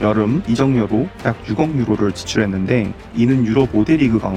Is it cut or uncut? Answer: uncut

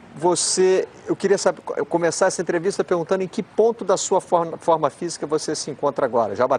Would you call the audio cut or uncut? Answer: cut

